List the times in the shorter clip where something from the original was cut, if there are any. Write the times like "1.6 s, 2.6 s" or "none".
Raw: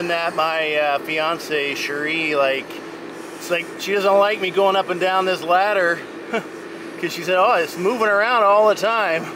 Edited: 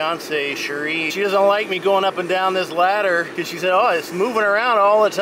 1.1 s, 3.4 s